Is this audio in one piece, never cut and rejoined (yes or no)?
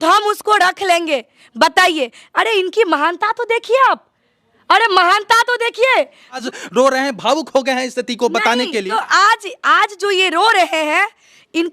no